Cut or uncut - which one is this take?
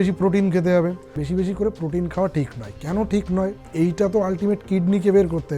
cut